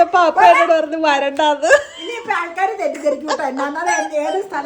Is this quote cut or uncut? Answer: uncut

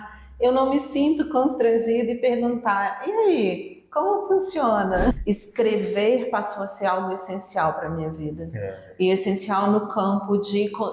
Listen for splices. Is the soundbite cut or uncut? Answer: cut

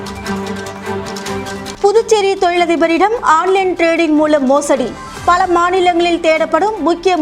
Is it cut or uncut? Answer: cut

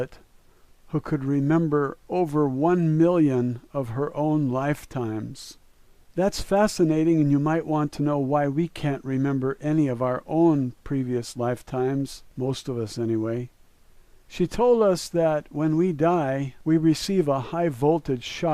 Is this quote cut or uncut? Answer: cut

